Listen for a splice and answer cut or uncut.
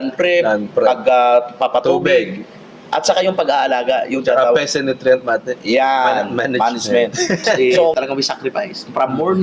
cut